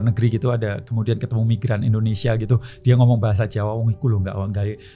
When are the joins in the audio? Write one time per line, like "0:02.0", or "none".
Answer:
none